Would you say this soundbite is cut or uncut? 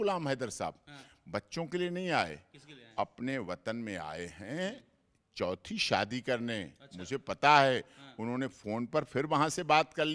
uncut